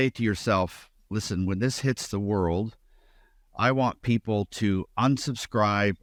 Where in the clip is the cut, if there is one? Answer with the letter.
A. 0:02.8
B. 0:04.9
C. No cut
C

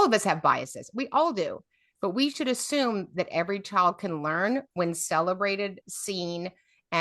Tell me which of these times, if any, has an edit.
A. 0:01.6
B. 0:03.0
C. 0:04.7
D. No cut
D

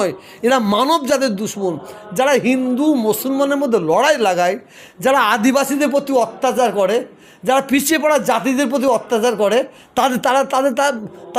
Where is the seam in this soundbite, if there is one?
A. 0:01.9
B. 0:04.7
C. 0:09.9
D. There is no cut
D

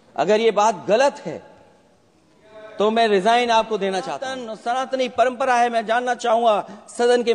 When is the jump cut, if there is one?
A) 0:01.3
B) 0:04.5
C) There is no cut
B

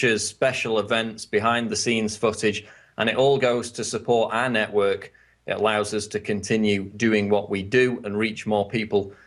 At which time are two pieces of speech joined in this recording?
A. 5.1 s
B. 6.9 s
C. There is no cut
B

